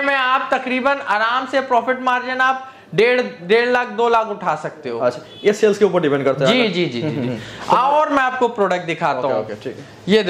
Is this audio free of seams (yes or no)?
yes